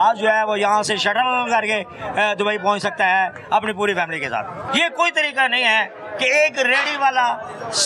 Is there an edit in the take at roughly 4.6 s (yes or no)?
yes